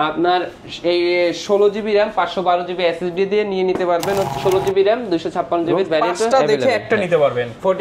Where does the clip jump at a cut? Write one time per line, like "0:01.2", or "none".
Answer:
0:04.4